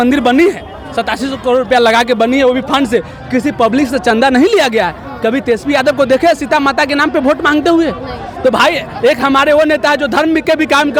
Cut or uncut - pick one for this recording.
uncut